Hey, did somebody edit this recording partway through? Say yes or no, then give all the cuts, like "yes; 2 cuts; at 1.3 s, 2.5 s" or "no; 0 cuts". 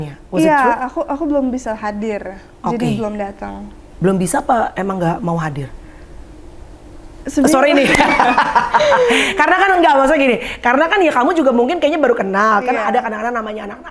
no; 0 cuts